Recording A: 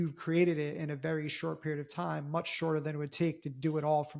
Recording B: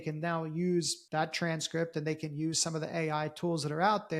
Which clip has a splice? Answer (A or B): B